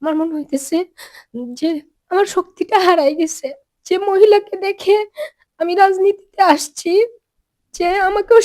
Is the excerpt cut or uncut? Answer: cut